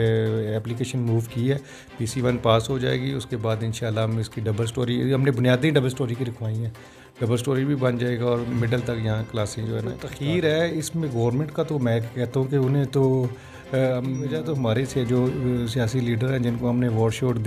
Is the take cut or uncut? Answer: cut